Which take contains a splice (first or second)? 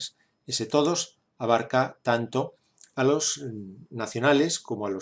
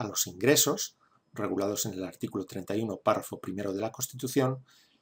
first